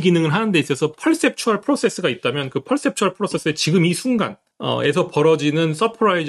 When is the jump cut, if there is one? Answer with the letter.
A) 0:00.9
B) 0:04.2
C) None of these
B